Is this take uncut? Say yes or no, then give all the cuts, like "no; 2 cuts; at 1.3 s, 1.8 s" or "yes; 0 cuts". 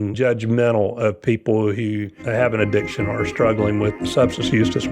no; 2 cuts; at 2.2 s, 4.0 s